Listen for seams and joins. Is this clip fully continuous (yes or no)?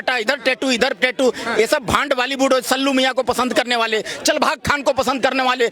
yes